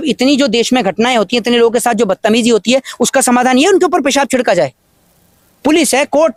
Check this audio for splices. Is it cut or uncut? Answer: uncut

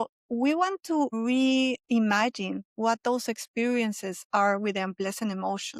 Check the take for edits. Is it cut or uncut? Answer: cut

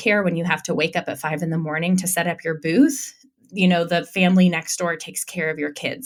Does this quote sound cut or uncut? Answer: uncut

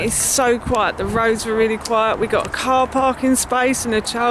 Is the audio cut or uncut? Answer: uncut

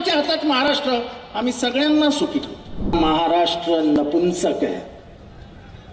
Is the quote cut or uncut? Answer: cut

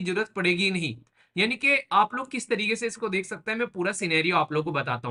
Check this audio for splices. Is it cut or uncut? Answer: uncut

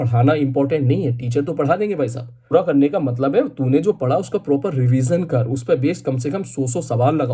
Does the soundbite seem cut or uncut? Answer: cut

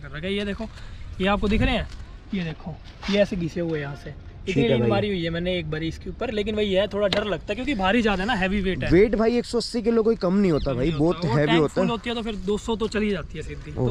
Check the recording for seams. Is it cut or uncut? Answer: uncut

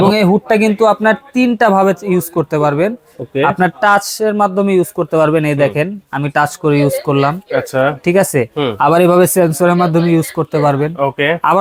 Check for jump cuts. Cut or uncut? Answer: uncut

